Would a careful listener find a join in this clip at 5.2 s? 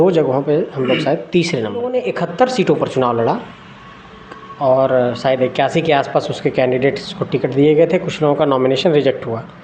no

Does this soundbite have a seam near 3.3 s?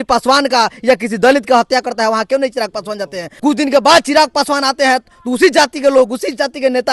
yes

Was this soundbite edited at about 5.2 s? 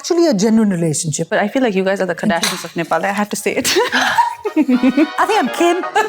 yes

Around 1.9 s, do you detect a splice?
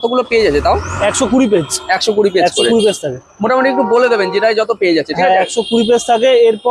no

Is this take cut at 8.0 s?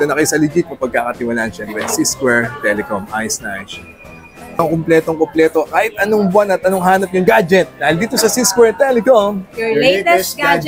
no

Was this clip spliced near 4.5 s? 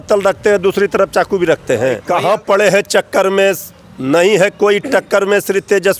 no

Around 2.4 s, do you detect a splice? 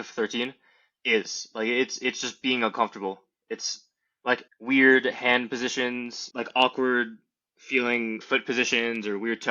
no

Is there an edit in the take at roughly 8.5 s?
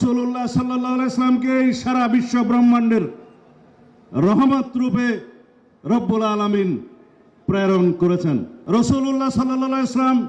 yes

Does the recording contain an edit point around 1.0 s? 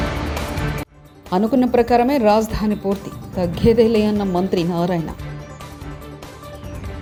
no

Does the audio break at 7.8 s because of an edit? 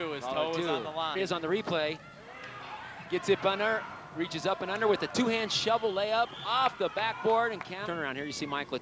yes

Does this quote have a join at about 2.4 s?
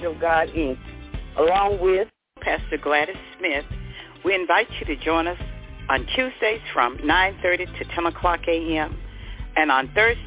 yes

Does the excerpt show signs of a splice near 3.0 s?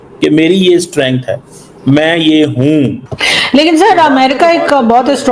yes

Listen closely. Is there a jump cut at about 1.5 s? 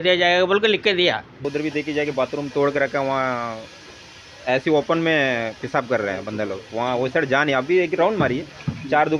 yes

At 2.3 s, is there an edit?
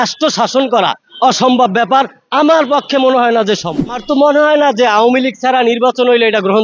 no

